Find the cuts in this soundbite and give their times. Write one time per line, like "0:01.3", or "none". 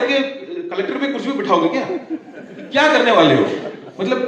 none